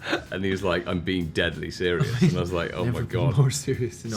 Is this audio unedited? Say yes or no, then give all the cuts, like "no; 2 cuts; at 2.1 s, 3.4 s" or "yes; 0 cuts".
yes; 0 cuts